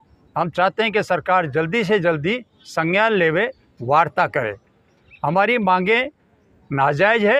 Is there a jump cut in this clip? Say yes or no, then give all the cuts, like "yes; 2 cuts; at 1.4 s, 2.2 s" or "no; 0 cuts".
no; 0 cuts